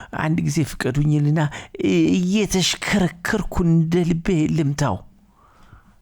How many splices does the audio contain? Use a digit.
0